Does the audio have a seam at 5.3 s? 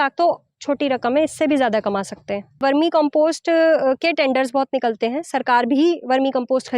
no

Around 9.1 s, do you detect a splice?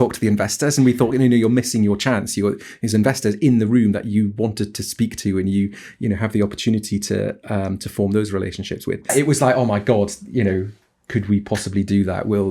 yes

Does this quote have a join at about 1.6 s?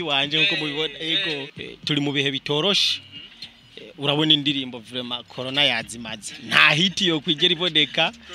yes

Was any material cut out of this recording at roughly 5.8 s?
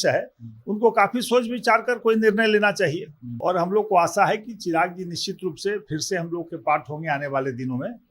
no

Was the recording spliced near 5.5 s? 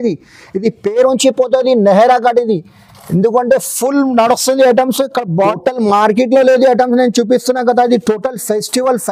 yes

